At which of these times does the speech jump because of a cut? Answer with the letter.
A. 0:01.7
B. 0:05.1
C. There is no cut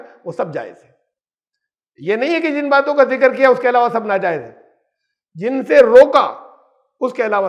C